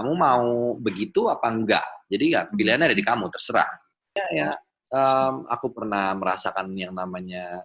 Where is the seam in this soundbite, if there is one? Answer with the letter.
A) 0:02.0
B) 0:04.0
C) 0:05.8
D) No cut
B